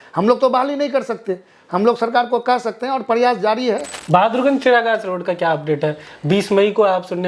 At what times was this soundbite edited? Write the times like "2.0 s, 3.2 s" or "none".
3.9 s